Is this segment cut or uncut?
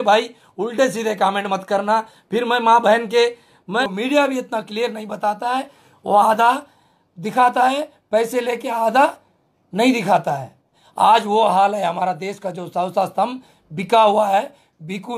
cut